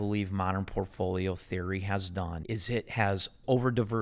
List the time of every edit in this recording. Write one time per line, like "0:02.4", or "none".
0:02.4